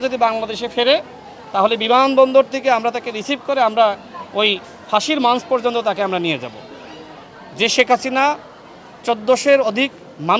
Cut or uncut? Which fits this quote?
uncut